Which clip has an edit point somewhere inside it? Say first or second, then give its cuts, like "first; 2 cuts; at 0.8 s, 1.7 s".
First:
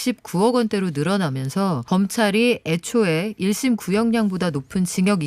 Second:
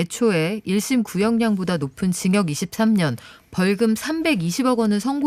first; 1 cut; at 1.8 s